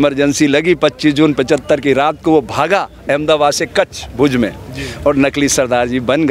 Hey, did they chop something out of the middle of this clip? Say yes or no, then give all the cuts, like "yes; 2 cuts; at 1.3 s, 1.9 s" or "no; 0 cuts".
no; 0 cuts